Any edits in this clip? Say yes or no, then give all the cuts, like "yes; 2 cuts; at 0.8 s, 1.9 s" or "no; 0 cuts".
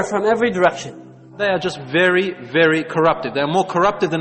yes; 1 cut; at 1.3 s